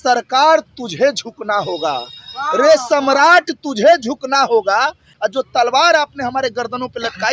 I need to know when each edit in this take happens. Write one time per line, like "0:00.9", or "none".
none